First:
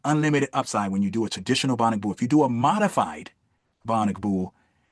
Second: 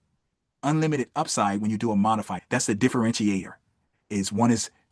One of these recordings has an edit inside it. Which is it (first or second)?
second